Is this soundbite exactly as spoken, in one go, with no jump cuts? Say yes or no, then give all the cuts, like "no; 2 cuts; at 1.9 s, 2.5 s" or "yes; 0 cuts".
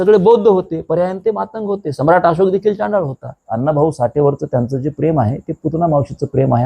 no; 1 cut; at 3.3 s